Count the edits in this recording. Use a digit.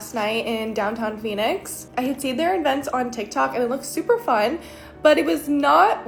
0